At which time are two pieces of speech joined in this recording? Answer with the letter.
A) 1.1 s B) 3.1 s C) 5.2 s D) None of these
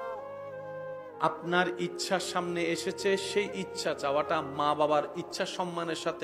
A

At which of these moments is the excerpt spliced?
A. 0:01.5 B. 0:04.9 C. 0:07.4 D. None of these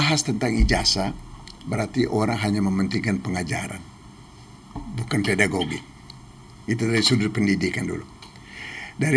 D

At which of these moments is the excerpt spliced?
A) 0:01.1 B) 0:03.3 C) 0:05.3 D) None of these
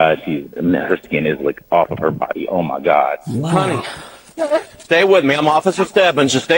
B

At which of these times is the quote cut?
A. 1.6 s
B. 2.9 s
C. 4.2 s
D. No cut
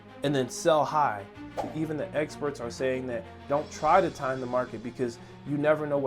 A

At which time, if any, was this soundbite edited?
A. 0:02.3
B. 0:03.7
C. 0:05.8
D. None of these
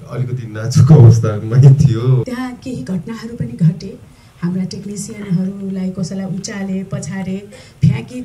A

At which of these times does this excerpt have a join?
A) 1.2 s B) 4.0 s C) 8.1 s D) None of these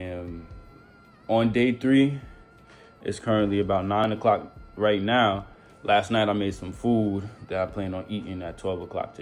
B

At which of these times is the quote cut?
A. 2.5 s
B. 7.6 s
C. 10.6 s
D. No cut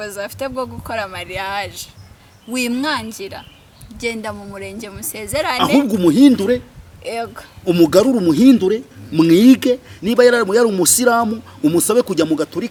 D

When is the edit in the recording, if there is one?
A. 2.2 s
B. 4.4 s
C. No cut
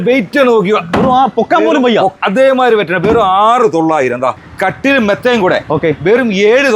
B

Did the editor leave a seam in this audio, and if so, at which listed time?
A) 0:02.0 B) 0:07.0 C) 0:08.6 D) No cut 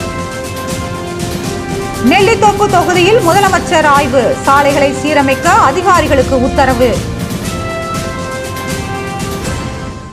B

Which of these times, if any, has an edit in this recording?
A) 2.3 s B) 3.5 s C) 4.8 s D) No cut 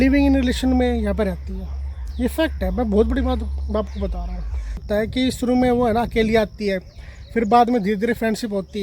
C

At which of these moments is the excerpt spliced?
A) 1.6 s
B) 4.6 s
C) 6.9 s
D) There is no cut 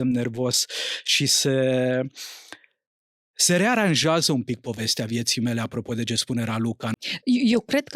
C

